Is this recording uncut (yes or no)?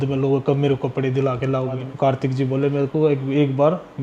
no